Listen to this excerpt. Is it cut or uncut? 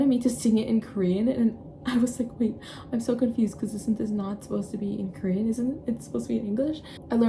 uncut